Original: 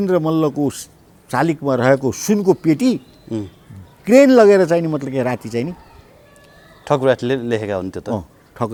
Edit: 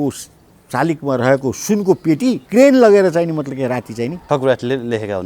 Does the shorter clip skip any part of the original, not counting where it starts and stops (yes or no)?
yes